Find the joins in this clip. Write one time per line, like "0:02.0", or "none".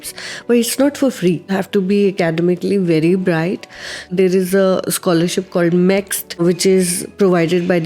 0:01.5
0:04.1
0:06.4